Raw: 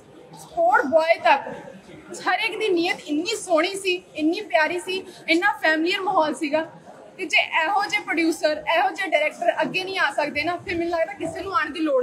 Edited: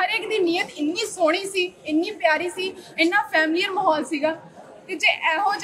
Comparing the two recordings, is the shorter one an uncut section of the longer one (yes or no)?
yes